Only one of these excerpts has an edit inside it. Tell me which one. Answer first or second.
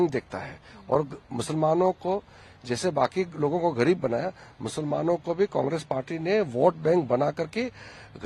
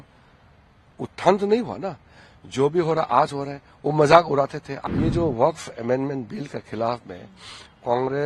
second